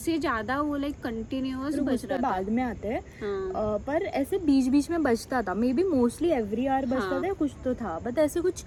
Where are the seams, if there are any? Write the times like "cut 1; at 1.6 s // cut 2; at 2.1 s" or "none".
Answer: none